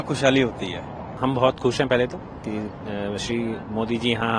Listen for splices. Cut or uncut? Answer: cut